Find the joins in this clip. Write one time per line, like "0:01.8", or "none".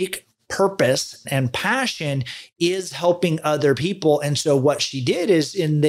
0:01.2